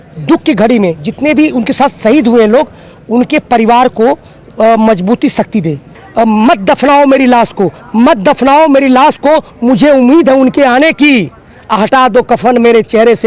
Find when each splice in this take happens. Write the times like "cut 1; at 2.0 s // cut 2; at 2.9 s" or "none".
cut 1; at 6.0 s